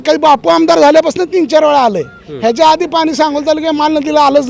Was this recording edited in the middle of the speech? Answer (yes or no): no